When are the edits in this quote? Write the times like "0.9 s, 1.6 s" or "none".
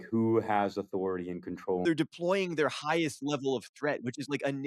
1.8 s